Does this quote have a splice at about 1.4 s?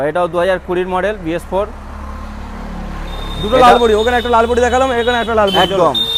no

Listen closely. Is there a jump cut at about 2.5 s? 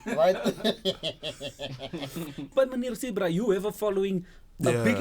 yes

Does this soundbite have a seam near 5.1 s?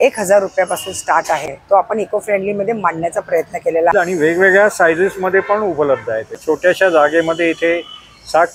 no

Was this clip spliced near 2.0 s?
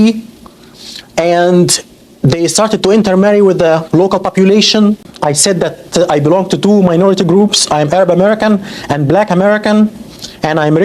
no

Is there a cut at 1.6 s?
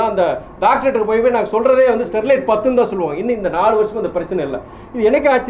no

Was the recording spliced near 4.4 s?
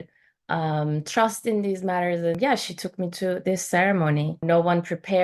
yes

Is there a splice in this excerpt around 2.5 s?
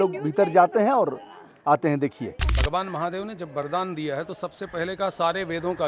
yes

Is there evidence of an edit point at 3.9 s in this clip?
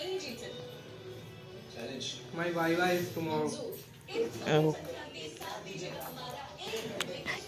no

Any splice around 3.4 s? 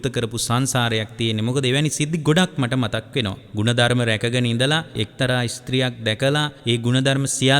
yes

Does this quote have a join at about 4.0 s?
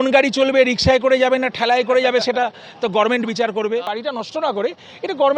yes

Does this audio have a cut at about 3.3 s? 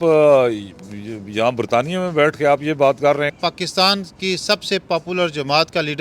yes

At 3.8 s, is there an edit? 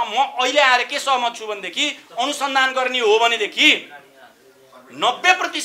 no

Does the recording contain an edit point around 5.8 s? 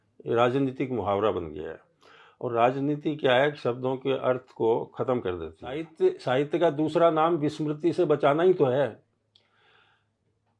yes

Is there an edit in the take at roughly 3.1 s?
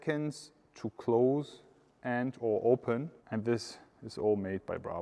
yes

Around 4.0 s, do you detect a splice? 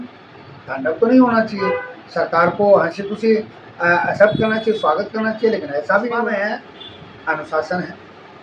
no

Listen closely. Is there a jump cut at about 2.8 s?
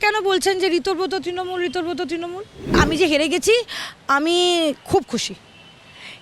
yes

